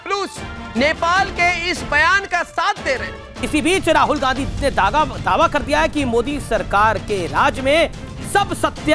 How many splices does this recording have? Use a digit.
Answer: 1